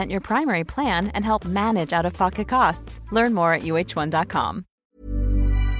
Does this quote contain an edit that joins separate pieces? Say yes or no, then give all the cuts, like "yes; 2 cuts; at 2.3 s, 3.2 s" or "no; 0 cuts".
yes; 1 cut; at 4.9 s